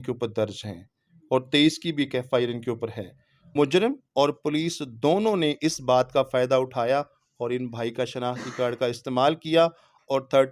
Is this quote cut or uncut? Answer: cut